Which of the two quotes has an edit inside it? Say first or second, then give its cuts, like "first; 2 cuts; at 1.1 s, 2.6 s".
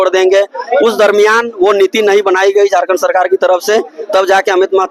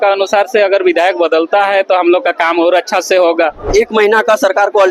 second; 1 cut; at 3.7 s